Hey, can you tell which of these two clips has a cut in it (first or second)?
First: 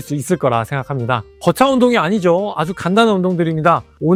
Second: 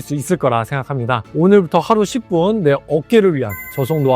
second